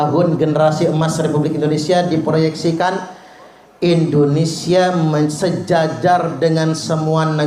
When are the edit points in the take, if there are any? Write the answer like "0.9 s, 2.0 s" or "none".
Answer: none